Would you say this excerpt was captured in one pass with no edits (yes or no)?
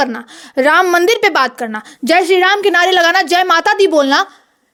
yes